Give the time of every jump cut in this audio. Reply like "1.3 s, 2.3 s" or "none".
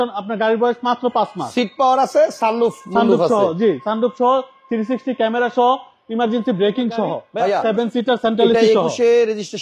7.2 s

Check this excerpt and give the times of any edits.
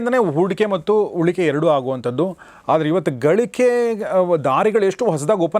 none

